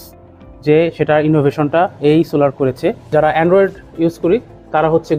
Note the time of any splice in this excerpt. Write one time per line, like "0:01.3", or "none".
0:03.1